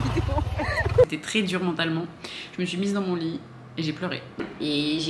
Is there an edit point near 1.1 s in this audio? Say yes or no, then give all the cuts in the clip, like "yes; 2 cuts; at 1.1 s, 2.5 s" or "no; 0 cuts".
yes; 2 cuts; at 1.1 s, 4.4 s